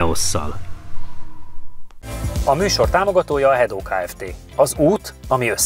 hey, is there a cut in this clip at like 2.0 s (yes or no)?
yes